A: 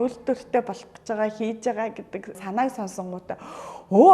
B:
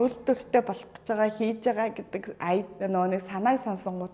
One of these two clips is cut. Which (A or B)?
A